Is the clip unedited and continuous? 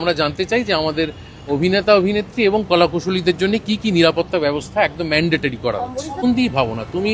no; 1 cut; at 6.2 s

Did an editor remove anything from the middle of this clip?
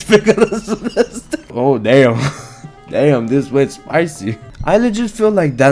yes; 2 cuts; at 1.5 s, 4.5 s

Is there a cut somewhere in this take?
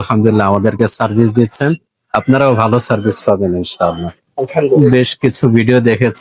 yes; 1 cut; at 4.8 s

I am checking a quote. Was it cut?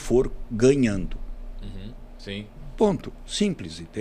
no; 0 cuts

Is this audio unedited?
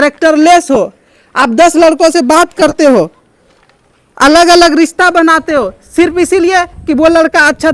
yes; 0 cuts

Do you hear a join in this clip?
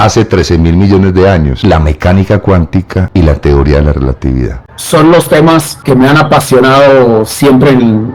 yes; 4 cuts; at 1.5 s, 3.0 s, 4.7 s, 5.7 s

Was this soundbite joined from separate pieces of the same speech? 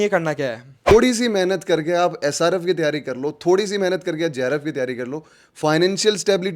yes; 1 cut; at 0.9 s

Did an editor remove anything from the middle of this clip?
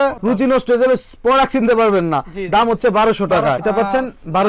yes; 1 cut; at 3.6 s

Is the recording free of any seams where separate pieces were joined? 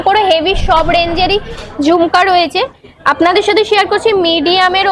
yes; 0 cuts

